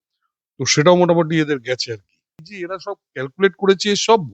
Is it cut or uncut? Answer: cut